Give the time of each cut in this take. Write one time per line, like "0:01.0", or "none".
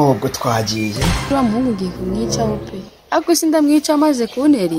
0:01.3